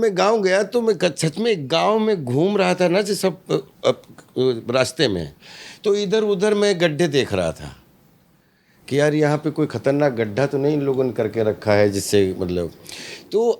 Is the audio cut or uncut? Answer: uncut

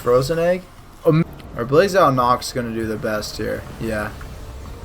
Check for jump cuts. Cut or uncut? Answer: cut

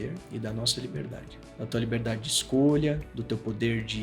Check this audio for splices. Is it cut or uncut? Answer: cut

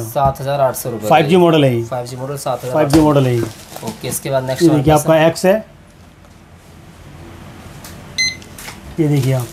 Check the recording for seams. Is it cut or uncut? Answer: uncut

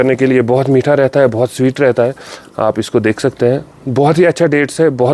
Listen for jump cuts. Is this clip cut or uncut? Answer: uncut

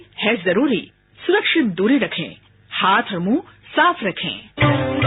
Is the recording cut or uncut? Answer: uncut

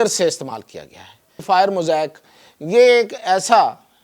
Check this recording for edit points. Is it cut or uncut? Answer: cut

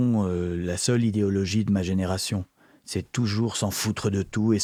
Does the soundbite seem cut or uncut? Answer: uncut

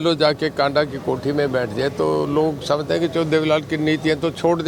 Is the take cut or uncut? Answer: uncut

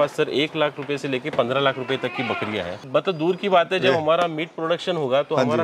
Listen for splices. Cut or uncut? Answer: cut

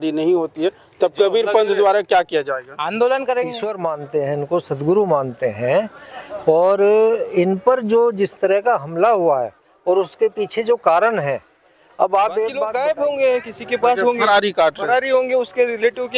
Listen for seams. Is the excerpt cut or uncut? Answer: cut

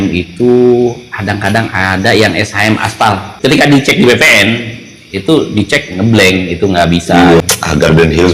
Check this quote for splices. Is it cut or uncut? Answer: cut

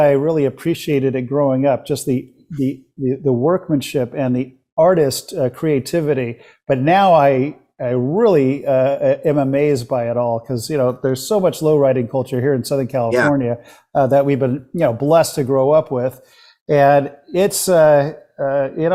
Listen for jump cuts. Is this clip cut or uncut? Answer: uncut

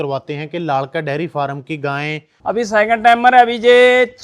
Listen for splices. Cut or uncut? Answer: cut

